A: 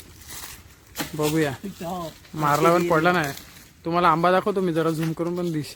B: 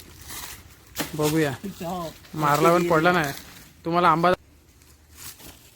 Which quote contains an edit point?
B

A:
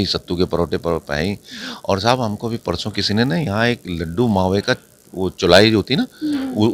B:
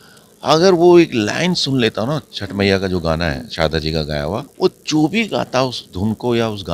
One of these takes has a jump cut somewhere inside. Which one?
B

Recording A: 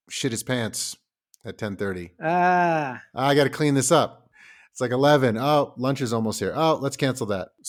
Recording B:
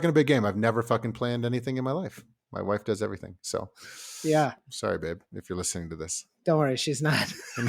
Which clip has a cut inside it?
B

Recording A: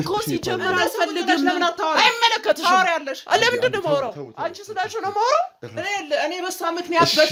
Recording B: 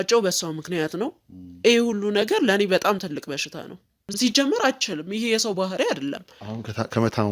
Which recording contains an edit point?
B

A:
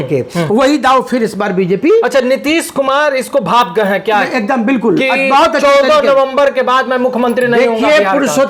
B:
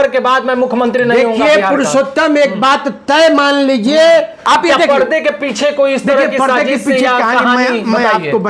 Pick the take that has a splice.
B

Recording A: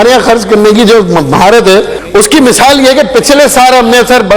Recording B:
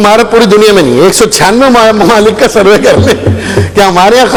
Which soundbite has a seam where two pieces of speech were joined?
A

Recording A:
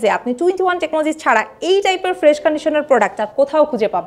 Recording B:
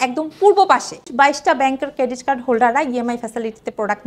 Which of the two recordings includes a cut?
B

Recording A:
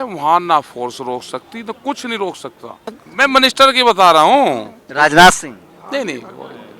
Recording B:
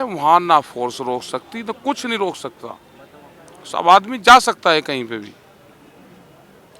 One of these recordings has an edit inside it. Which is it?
A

